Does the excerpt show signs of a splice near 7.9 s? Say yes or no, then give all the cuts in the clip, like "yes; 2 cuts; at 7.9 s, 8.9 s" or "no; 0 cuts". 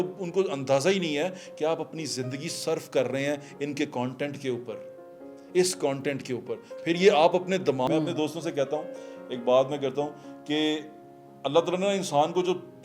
yes; 1 cut; at 7.9 s